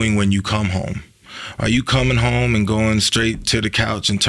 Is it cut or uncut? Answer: uncut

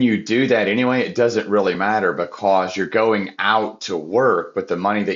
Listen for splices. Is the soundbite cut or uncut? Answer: uncut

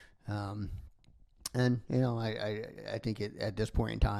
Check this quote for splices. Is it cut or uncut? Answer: uncut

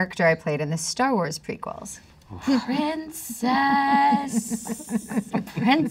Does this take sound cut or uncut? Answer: uncut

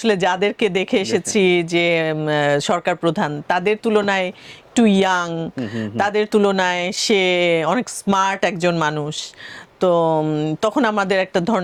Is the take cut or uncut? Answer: uncut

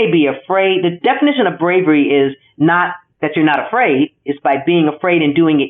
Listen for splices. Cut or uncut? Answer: cut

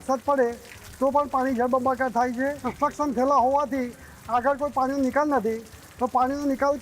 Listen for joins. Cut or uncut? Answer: cut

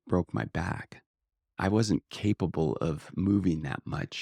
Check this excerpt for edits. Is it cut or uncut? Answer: cut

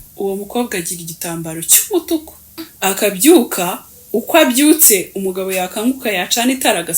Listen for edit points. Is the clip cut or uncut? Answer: cut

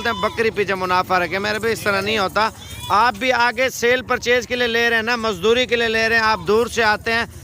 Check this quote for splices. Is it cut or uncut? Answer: uncut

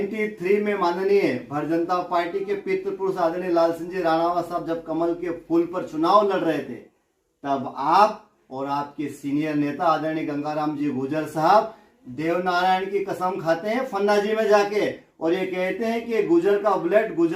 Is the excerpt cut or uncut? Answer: uncut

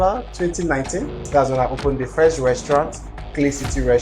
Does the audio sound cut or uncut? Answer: cut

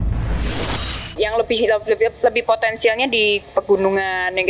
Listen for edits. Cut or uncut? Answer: uncut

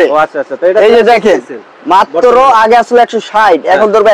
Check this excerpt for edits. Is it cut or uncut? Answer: uncut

